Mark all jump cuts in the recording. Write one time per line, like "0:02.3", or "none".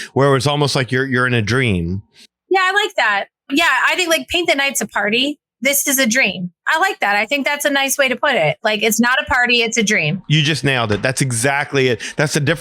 0:02.5
0:03.4